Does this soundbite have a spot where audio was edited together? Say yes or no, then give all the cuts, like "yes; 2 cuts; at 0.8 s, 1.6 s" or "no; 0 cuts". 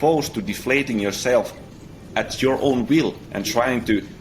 yes; 1 cut; at 3.3 s